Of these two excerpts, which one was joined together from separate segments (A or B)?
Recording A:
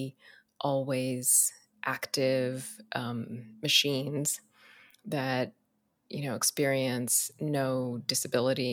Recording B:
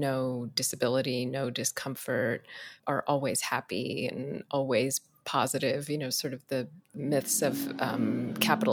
B